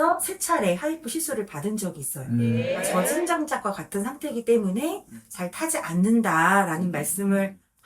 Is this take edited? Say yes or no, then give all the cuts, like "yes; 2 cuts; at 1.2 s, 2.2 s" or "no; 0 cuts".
yes; 1 cut; at 2.6 s